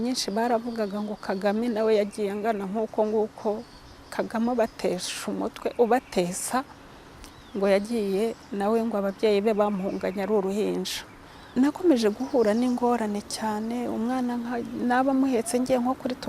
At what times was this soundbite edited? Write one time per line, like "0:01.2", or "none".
0:11.5